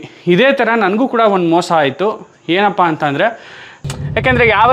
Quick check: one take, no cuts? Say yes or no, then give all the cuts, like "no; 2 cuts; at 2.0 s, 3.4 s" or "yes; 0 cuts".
no; 1 cut; at 3.8 s